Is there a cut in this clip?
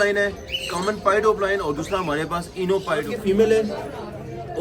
yes; 1 cut; at 3.1 s

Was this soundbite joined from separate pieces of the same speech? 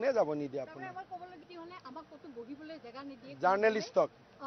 yes; 1 cut; at 1.4 s

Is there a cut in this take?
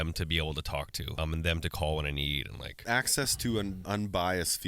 yes; 3 cuts; at 1.0 s, 2.8 s, 3.8 s

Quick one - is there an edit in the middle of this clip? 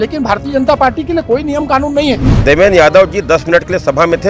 yes; 1 cut; at 2.3 s

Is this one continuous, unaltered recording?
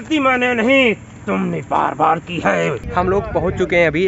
no; 1 cut; at 2.8 s

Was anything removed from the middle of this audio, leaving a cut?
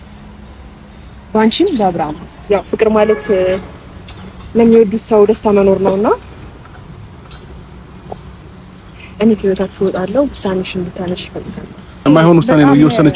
yes; 2 cuts; at 2.3 s, 12.0 s

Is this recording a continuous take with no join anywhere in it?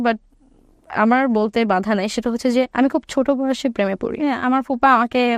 no; 1 cut; at 4.3 s

